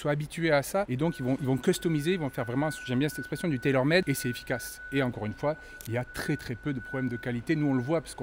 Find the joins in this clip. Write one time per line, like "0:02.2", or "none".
none